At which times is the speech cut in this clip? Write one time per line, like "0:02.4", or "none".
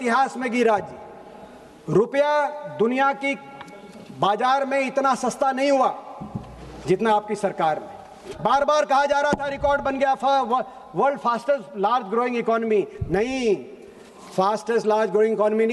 0:08.2